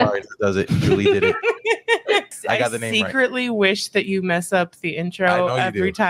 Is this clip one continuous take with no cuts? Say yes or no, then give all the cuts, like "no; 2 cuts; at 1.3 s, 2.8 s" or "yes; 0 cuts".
no; 1 cut; at 2.3 s